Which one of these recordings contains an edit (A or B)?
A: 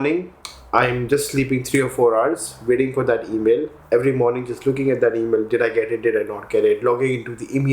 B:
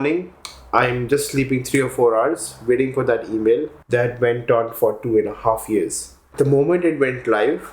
B